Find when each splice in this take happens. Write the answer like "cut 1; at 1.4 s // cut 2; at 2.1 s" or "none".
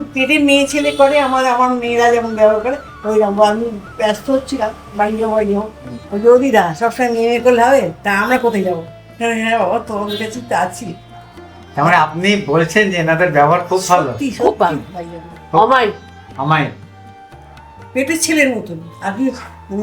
none